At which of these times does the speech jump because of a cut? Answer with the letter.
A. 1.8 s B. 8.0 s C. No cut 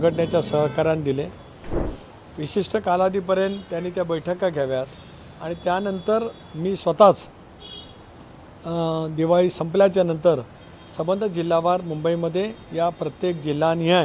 A